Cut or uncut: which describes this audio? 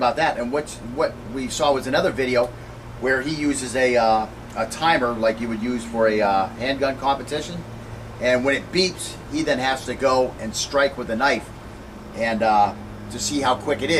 uncut